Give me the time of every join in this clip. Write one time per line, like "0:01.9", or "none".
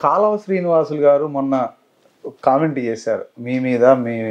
none